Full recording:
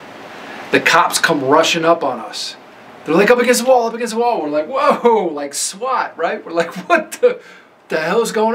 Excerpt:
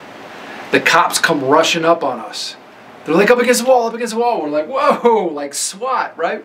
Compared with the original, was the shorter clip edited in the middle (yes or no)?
no